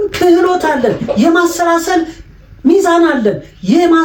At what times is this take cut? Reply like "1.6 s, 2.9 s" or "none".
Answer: none